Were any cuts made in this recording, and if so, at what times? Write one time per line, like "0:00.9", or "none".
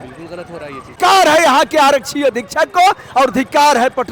0:01.0